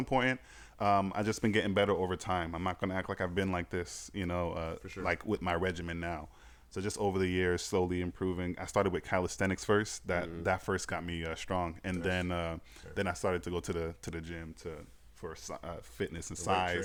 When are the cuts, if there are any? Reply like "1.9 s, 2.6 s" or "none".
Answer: none